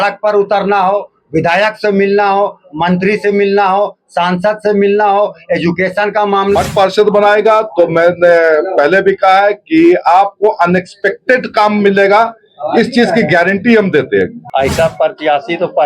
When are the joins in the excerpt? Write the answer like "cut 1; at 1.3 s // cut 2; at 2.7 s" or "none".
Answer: cut 1; at 6.6 s // cut 2; at 14.4 s